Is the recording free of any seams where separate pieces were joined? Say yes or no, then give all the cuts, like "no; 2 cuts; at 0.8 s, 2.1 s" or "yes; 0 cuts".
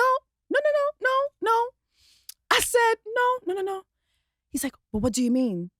yes; 0 cuts